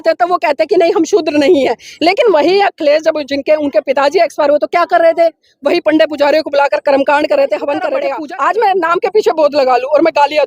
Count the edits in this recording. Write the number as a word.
one